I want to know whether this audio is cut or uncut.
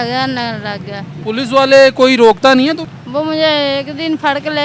cut